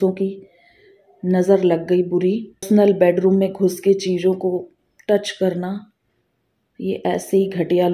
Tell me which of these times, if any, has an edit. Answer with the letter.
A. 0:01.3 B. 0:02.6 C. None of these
B